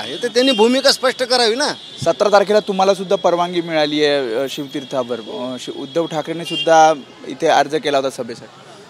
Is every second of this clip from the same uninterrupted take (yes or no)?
yes